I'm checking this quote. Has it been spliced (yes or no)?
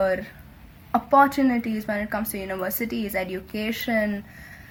no